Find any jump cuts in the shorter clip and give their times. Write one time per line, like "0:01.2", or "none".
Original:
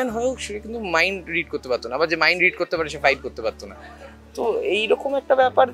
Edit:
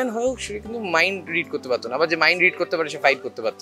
none